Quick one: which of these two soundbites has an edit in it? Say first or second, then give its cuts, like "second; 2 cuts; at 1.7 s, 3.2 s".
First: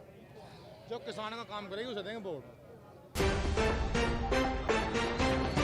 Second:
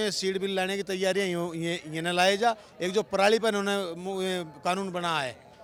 first; 1 cut; at 3.0 s